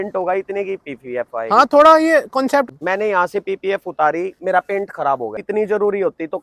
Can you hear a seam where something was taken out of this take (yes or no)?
yes